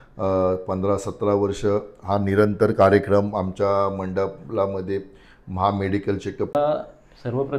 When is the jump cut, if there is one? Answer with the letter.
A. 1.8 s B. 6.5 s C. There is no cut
B